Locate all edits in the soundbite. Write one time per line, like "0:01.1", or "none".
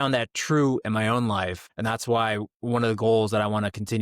0:01.6